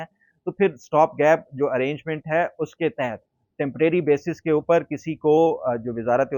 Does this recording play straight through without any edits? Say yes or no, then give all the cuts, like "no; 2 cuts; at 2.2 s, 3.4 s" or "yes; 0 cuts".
yes; 0 cuts